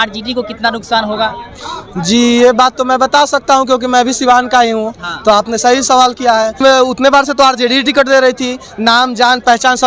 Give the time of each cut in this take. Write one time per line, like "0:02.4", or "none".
0:06.6